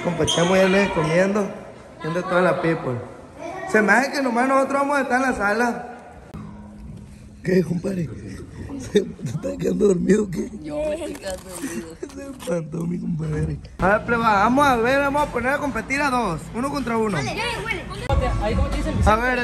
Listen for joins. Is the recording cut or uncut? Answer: cut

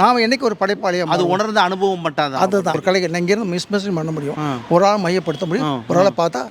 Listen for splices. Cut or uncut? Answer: cut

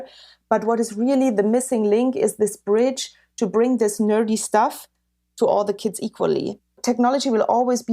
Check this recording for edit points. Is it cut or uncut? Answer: cut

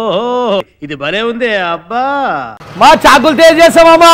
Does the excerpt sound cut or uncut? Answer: cut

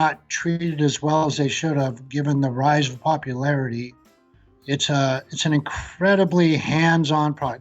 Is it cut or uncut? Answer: cut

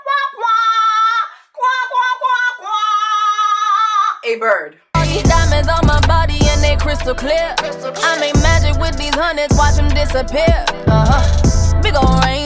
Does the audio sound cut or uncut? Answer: cut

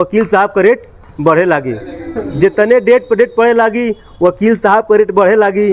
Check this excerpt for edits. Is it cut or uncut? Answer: uncut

